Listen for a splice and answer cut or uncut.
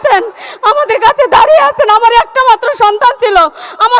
uncut